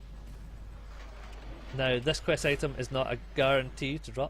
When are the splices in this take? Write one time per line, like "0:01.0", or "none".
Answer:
none